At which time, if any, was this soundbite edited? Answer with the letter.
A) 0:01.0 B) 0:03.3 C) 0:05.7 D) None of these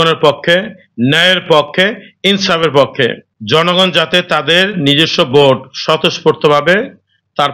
B